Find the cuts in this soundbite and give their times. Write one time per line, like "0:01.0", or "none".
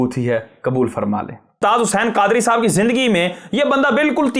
0:01.6